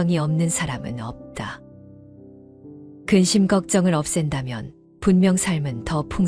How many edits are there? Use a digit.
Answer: 2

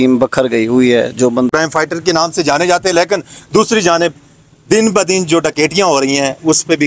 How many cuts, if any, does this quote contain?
1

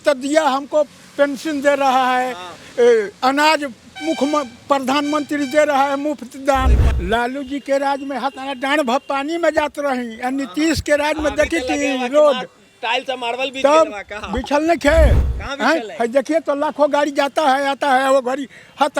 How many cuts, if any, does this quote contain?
1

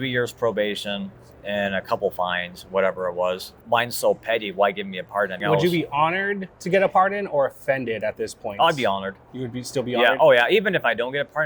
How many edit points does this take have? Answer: 2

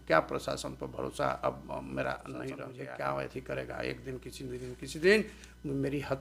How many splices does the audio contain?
1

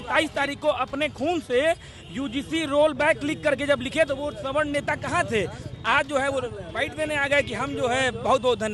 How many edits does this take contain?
0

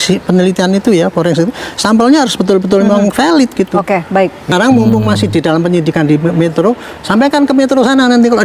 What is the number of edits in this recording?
1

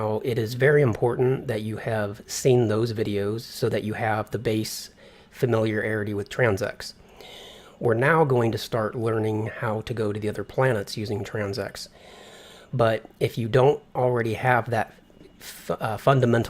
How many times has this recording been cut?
1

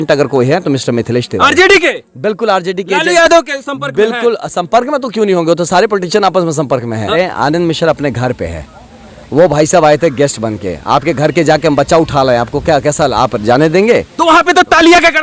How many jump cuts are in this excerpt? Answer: 1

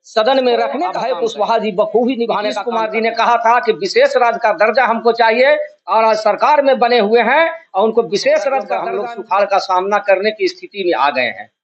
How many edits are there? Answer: 3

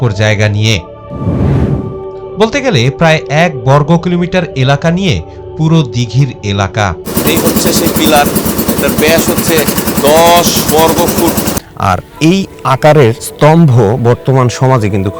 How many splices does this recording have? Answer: 2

